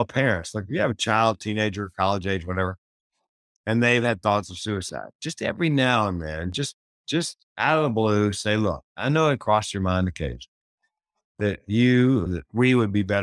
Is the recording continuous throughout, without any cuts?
yes; 0 cuts

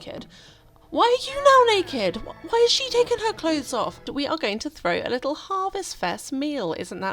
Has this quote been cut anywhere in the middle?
yes; 1 cut; at 4.1 s

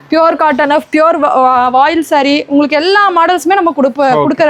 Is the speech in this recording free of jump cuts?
yes; 0 cuts

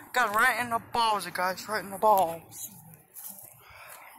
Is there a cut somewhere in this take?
no; 0 cuts

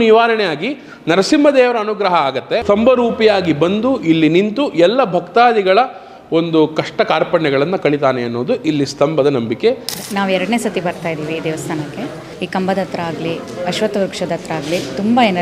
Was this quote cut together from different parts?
yes; 3 cuts; at 2.6 s, 9.9 s, 12.2 s

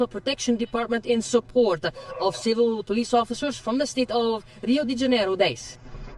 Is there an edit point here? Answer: no; 0 cuts

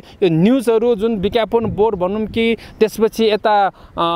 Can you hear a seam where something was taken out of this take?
no; 0 cuts

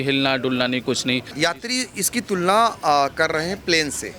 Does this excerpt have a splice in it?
yes; 1 cut; at 1.3 s

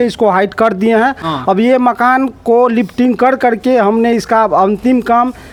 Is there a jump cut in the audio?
no; 0 cuts

